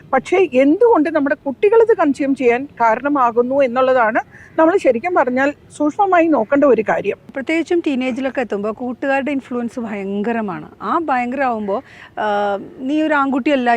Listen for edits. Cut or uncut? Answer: cut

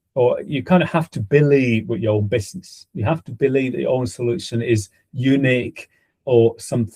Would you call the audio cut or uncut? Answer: uncut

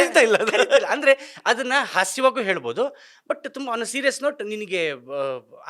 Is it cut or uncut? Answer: uncut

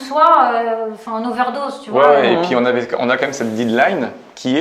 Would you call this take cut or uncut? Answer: uncut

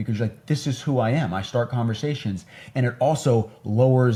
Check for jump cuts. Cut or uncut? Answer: uncut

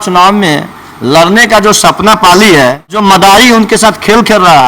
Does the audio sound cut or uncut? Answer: cut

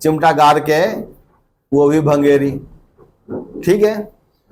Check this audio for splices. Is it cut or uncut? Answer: uncut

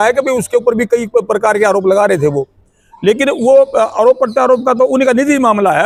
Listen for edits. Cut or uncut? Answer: uncut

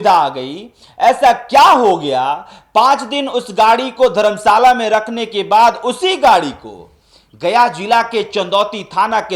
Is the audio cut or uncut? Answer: uncut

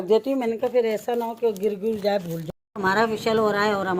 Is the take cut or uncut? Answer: cut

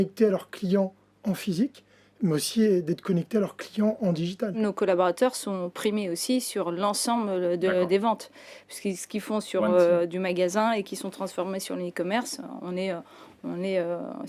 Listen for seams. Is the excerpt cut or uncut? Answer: cut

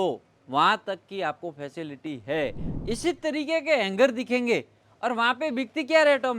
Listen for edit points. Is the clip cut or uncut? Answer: cut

